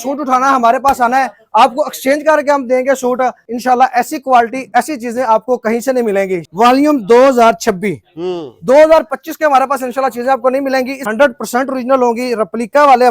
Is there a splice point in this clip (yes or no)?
yes